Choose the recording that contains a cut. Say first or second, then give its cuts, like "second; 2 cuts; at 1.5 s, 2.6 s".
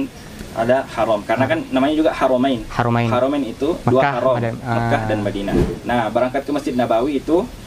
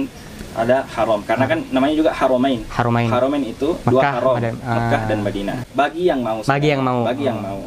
first; 1 cut; at 5.6 s